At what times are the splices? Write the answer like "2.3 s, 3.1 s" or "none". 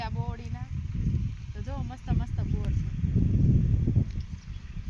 none

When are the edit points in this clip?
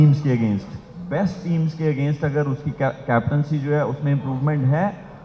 none

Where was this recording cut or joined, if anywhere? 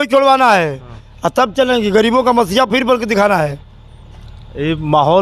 none

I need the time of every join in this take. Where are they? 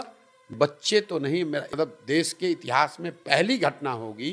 1.7 s

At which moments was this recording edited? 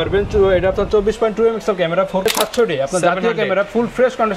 2.3 s

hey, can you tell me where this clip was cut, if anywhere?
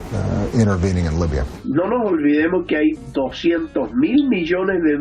1.6 s

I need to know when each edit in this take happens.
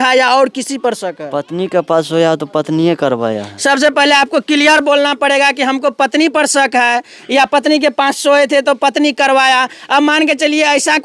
none

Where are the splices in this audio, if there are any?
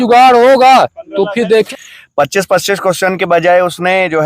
1.7 s

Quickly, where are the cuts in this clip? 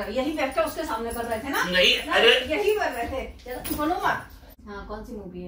4.5 s

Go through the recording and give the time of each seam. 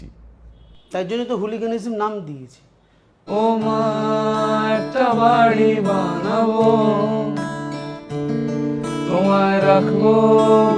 3.2 s

